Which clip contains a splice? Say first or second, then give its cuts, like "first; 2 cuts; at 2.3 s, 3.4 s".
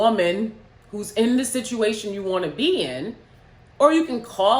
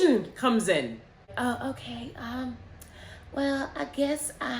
second; 1 cut; at 1.3 s